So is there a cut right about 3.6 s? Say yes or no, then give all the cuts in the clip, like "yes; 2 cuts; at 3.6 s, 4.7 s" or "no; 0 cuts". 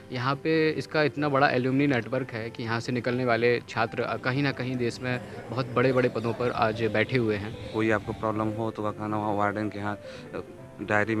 no; 1 cut; at 7.7 s